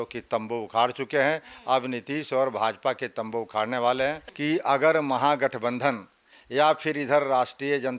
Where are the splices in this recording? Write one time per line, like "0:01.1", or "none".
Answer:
0:04.2